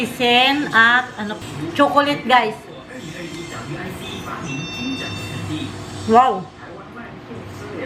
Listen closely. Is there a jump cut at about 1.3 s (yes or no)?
yes